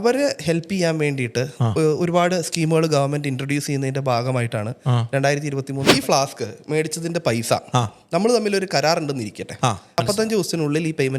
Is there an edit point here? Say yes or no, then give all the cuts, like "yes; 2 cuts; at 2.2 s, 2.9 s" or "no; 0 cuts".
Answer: yes; 2 cuts; at 5.9 s, 10.0 s